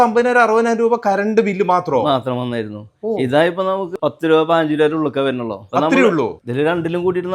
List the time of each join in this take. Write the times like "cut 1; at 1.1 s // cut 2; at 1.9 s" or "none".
cut 1; at 3.9 s // cut 2; at 6.3 s